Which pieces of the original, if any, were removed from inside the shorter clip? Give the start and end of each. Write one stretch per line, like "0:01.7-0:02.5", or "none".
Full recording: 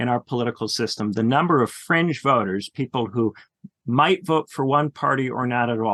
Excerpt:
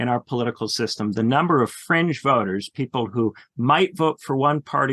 0:03.5-0:03.7